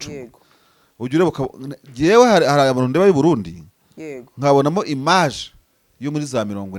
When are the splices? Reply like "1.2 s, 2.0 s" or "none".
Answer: none